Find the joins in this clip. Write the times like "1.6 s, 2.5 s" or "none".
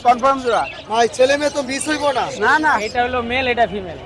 2.9 s